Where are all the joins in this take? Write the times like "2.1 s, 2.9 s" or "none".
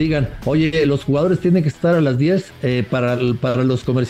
2.5 s